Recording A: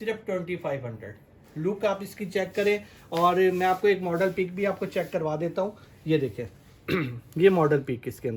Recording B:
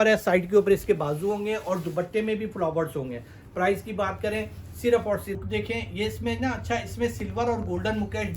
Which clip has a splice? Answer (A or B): B